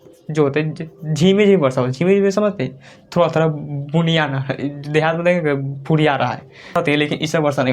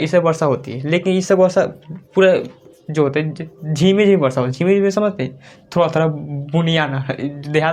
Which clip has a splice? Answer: first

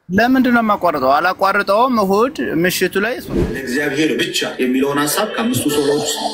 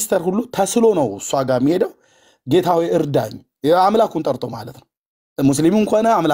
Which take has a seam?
first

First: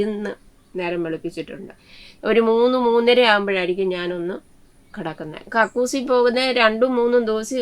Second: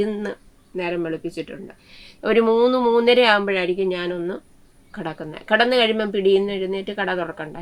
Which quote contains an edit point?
first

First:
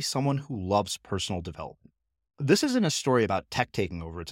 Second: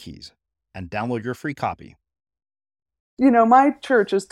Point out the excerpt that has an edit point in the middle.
second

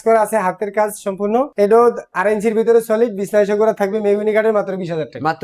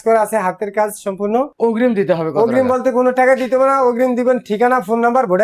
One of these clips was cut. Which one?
second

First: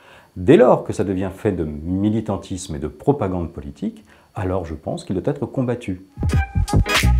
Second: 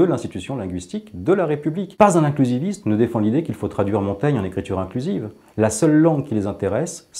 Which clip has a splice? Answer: first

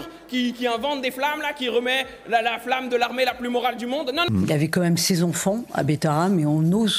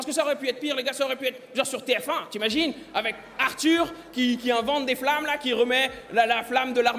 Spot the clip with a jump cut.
first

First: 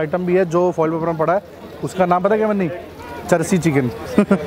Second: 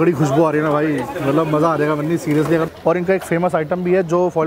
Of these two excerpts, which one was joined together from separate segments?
second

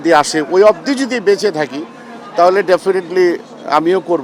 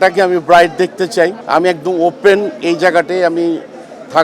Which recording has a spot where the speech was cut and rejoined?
second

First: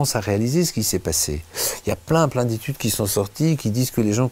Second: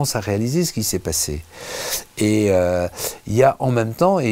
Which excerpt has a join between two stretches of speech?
first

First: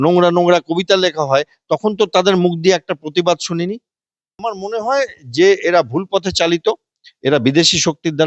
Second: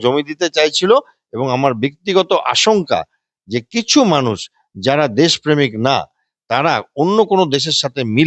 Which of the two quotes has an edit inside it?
first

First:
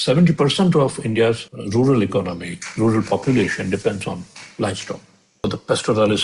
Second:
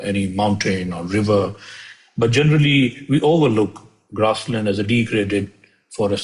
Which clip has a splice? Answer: first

